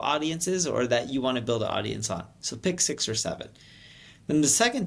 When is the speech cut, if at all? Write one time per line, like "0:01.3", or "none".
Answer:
none